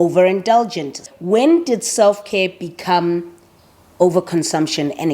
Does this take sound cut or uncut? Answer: cut